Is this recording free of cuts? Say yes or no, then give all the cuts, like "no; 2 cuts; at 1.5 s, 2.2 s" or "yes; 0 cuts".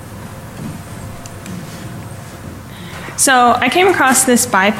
no; 1 cut; at 1.3 s